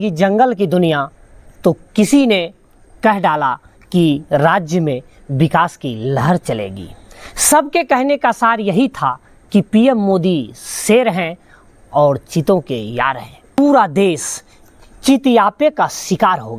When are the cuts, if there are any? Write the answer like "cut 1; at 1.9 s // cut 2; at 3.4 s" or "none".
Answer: cut 1; at 13.5 s